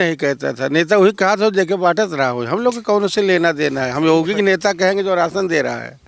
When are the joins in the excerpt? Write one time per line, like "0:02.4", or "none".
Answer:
none